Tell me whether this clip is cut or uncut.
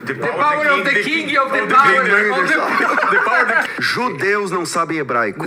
cut